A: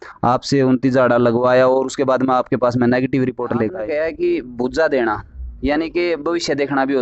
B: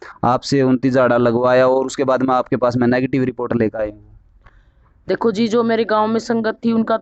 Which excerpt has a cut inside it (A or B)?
A